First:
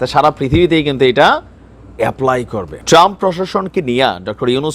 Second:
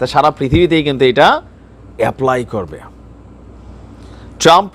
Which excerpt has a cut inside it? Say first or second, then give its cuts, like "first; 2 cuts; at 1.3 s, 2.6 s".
first; 1 cut; at 2.8 s